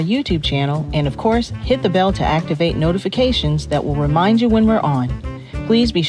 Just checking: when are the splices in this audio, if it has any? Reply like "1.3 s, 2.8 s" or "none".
none